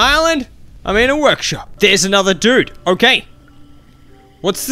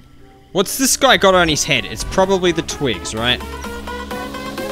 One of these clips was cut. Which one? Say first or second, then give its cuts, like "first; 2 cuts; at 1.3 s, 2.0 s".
first; 1 cut; at 1.7 s